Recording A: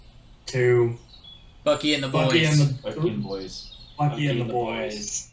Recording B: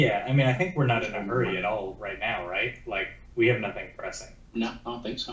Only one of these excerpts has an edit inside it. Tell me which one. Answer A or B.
B